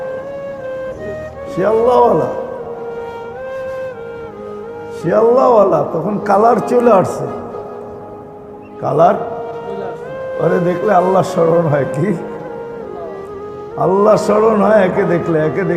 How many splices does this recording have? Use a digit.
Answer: 3